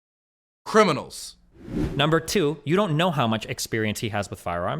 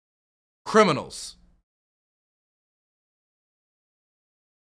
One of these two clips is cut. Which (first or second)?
first